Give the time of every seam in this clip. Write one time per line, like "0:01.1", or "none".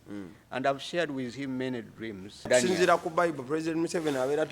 0:02.5